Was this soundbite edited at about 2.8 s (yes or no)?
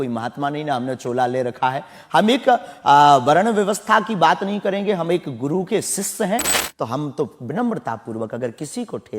no